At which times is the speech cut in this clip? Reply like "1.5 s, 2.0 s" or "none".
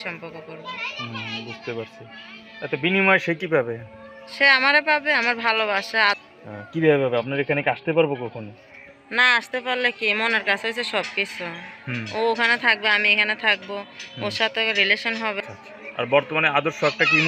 6.2 s, 15.4 s